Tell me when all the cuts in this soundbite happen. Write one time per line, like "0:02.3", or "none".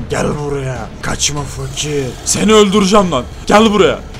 0:00.9
0:02.2
0:03.3